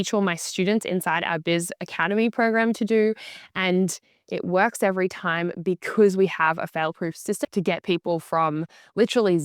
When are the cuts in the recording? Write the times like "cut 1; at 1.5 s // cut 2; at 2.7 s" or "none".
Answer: cut 1; at 7.4 s